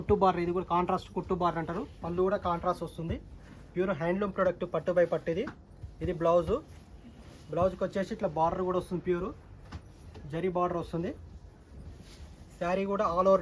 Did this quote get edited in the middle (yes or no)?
no